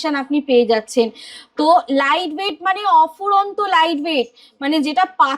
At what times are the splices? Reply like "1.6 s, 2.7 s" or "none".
none